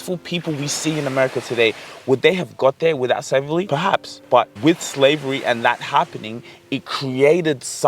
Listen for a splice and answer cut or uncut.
cut